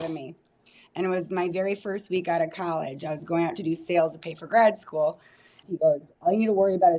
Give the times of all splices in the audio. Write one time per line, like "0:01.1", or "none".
0:05.6